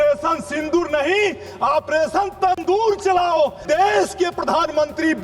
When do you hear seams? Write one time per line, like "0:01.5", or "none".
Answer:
0:03.6